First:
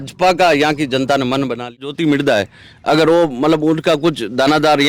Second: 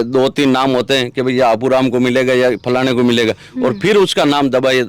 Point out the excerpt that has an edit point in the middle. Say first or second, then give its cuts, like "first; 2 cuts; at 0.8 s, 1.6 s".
first; 1 cut; at 1.7 s